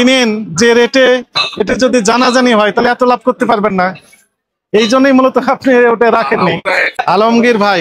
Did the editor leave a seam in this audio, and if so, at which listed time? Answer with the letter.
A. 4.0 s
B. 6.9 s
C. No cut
B